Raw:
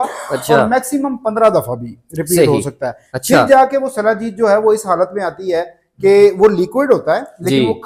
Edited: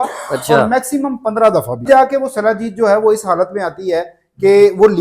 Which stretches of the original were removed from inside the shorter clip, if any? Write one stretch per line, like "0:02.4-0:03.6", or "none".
0:01.9-0:03.5